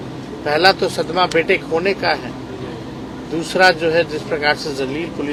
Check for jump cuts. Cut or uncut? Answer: uncut